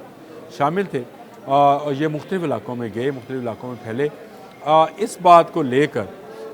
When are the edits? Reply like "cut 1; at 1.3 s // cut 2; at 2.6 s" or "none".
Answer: none